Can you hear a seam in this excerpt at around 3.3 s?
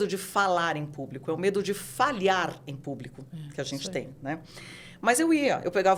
no; 0 cuts

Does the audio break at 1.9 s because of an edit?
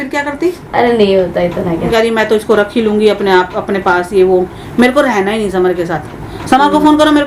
yes; 1 cut; at 1.9 s

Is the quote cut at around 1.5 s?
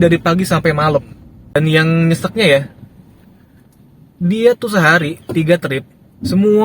yes; 1 cut; at 1.5 s

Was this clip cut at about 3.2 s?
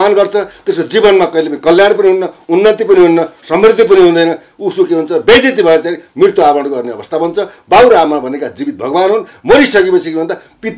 no; 0 cuts

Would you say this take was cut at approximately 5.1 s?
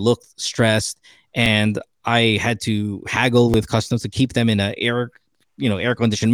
no; 0 cuts

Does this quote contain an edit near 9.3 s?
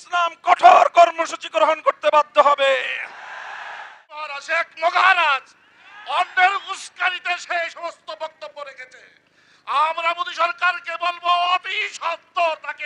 no; 1 cut; at 4.3 s

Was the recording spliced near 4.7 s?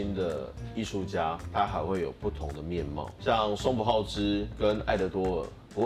no; 1 cut; at 3.1 s

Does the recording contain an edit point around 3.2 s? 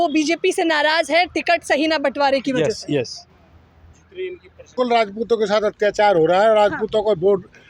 no; 1 cut; at 4.7 s

